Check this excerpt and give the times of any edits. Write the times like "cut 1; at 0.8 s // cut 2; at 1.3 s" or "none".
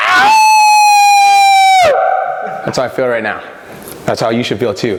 none